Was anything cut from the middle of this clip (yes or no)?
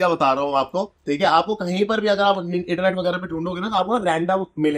no